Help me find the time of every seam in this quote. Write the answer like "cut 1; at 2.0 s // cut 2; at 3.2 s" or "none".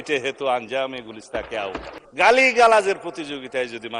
cut 1; at 2.0 s

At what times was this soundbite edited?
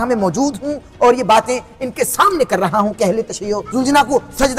cut 1; at 3.6 s

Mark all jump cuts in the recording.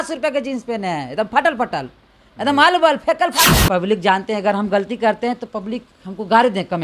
cut 1; at 3.5 s

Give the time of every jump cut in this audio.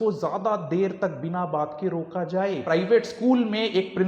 cut 1; at 2.6 s

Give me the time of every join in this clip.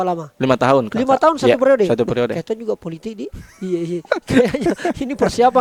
none

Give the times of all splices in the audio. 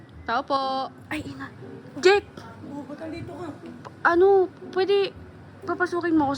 cut 1; at 1.0 s

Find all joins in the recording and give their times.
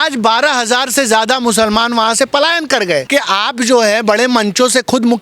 cut 1; at 3.1 s

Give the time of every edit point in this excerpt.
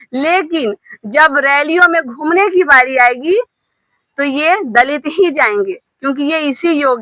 none

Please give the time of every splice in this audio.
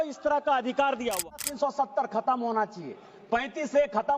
cut 1; at 1.4 s

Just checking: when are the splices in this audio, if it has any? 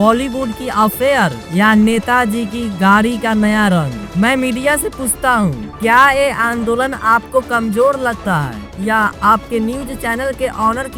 none

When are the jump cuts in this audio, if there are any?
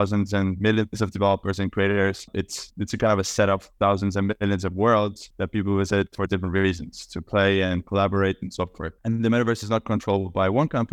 none

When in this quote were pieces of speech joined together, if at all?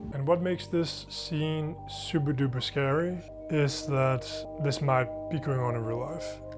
cut 1; at 1.5 s // cut 2; at 4.5 s

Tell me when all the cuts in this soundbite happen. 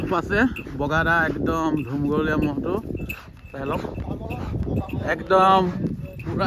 none

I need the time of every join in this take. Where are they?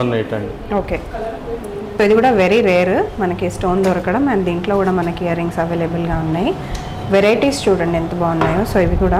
cut 1; at 2.0 s

